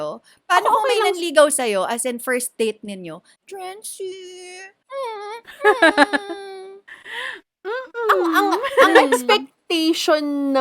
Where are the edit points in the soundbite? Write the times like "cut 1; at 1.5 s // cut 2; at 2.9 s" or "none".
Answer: cut 1; at 3.3 s // cut 2; at 4.8 s

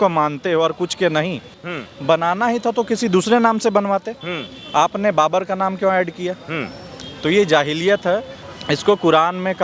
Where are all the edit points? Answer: cut 1; at 1.5 s // cut 2; at 8.4 s

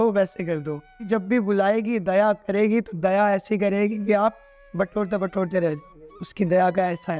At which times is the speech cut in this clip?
cut 1; at 1.1 s

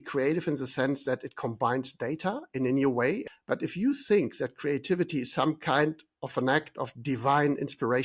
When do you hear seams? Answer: cut 1; at 3.3 s

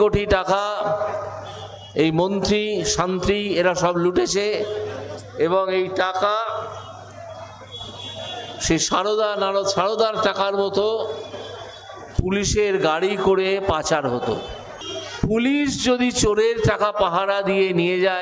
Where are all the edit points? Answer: none

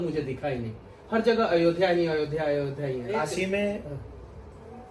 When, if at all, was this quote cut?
cut 1; at 3.2 s

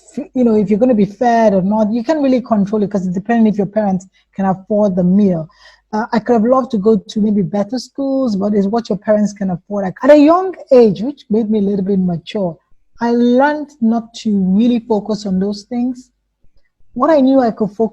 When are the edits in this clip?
cut 1; at 9.9 s

